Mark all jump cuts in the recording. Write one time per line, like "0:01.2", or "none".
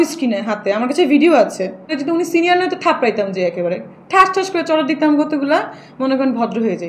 0:02.0